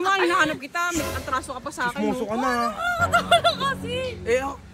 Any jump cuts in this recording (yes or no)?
no